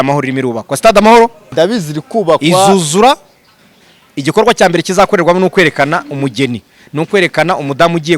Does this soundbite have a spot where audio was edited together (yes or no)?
yes